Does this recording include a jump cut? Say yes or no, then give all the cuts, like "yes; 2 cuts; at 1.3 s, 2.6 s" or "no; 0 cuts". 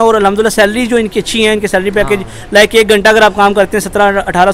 no; 0 cuts